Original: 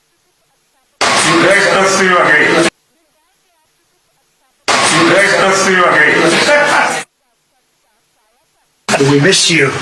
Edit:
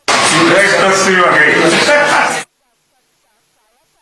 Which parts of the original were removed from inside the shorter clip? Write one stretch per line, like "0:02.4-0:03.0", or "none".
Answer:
0:02.6-0:06.3